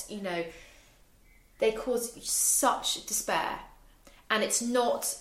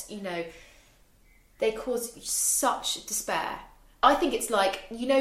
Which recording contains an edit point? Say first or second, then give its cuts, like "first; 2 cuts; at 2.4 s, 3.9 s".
second; 1 cut; at 4.0 s